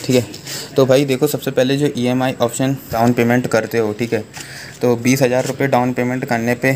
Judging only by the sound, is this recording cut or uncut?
cut